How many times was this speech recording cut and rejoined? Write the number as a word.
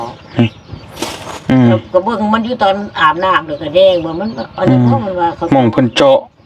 zero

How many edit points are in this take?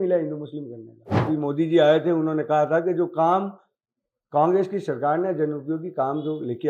one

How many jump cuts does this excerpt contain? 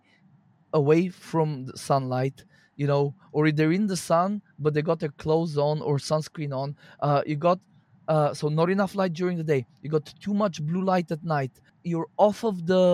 one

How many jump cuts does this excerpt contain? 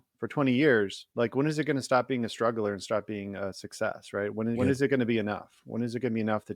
one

